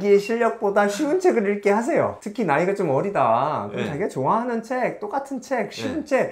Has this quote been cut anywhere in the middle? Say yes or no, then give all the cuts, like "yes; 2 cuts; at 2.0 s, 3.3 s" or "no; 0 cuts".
no; 0 cuts